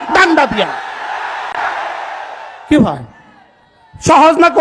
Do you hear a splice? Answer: no; 0 cuts

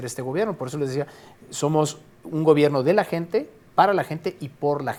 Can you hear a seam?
no; 0 cuts

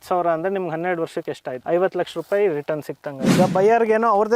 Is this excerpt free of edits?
no; 2 cuts; at 1.5 s, 3.3 s

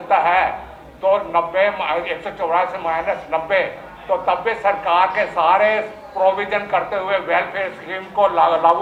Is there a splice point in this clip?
no; 0 cuts

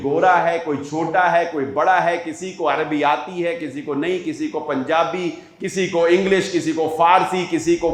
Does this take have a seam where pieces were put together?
no; 0 cuts

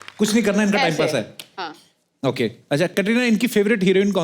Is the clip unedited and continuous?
yes; 0 cuts

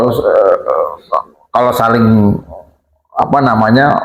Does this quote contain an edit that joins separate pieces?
no; 0 cuts

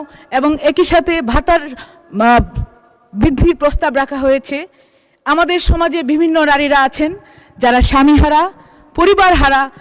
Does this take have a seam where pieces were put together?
no; 0 cuts

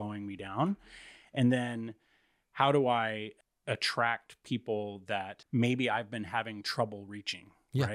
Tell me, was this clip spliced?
yes; 1 cut; at 5.4 s

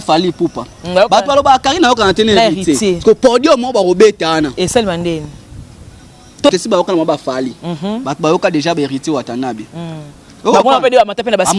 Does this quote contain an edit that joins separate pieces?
yes; 1 cut; at 6.5 s

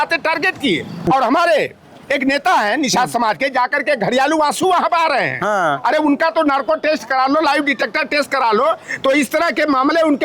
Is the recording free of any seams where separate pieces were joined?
no; 1 cut; at 1.1 s

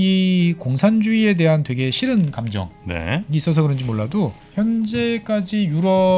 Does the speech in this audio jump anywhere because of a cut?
yes; 1 cut; at 4.4 s

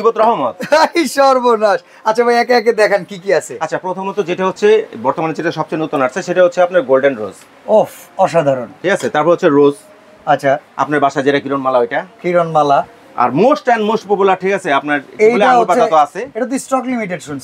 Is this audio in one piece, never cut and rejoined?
yes; 0 cuts

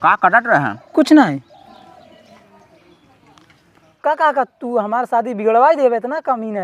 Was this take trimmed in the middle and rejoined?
yes; 1 cut; at 3.9 s

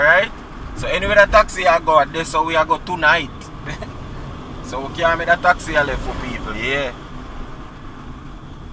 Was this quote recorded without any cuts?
yes; 0 cuts

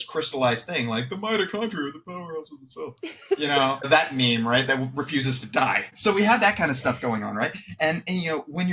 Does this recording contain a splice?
yes; 2 cuts; at 3.9 s, 5.9 s

